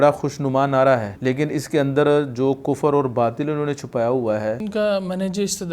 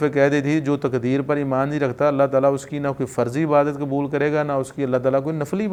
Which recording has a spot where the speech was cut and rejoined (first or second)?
first